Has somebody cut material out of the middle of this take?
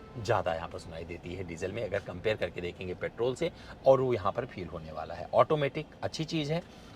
no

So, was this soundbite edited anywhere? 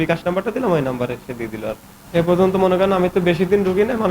no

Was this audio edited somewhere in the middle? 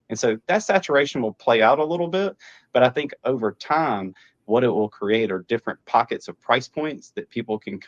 no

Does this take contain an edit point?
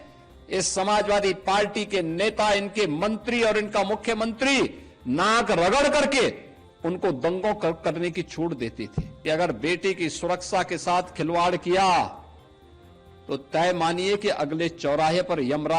yes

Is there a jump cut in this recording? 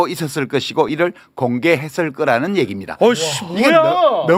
no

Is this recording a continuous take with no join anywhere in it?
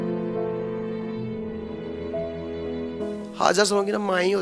no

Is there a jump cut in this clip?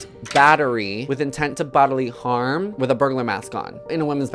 yes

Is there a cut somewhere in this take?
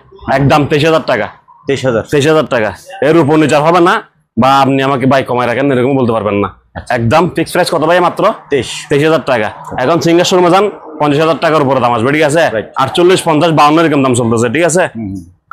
no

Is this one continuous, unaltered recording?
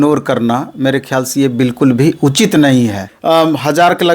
no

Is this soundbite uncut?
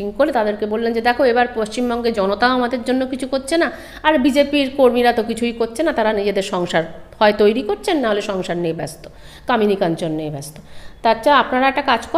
yes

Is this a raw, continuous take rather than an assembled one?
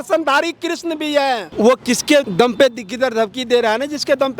no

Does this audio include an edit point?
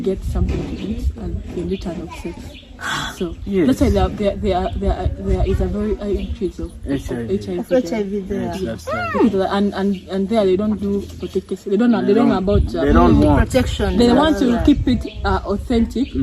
no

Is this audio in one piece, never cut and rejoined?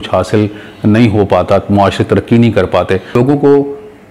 no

